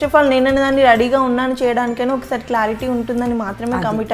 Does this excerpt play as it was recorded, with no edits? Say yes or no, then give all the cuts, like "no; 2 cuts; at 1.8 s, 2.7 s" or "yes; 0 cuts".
yes; 0 cuts